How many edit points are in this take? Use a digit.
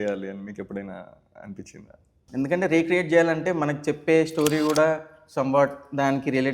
1